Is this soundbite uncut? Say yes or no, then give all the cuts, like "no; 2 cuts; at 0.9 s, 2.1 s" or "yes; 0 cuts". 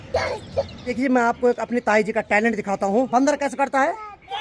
no; 2 cuts; at 0.9 s, 3.1 s